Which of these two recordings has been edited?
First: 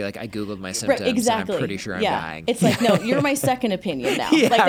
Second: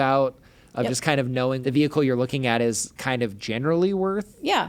second; 1 cut; at 1.6 s

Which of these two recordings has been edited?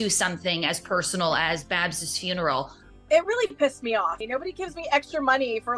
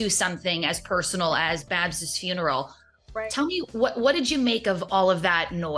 first; 2 cuts; at 2.9 s, 4.2 s

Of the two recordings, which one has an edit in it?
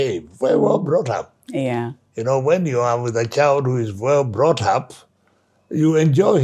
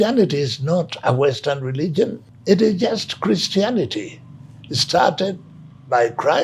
second; 1 cut; at 2.3 s

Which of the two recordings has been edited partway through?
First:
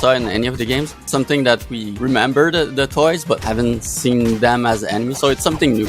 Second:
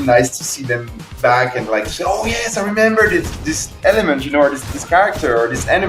first; 3 cuts; at 1.0 s, 1.8 s, 3.4 s

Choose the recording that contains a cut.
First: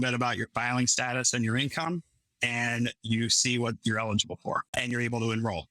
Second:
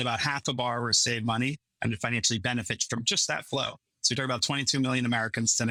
first; 1 cut; at 4.7 s

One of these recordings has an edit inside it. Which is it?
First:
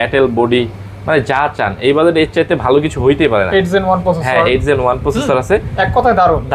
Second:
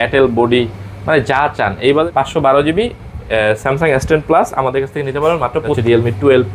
second; 2 cuts; at 2.0 s, 5.8 s

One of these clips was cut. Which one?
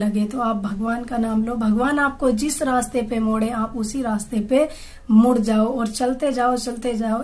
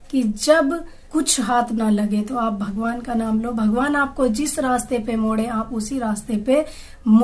second; 1 cut; at 0.9 s

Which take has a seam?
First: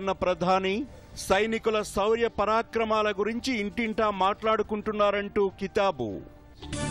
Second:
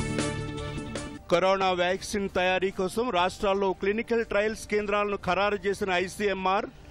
second; 1 cut; at 1.1 s

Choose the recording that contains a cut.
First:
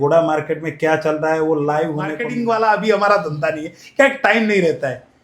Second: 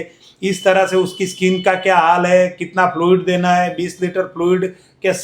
first; 1 cut; at 2.2 s

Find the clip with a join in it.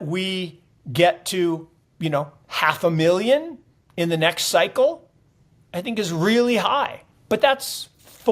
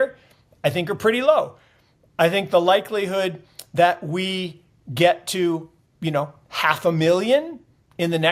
first; 1 cut; at 7.1 s

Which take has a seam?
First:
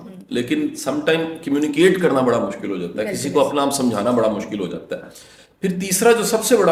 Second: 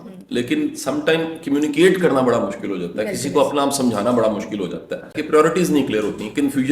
second; 1 cut; at 5.2 s

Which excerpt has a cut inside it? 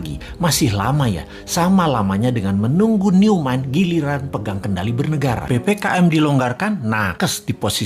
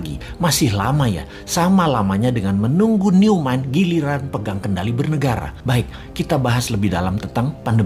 first; 1 cut; at 5.4 s

